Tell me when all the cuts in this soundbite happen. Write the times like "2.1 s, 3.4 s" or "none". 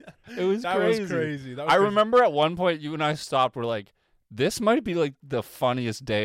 none